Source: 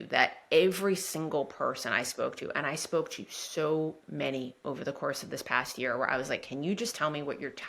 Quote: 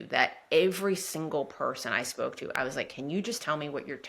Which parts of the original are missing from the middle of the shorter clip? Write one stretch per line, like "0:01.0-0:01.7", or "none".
0:02.6-0:06.1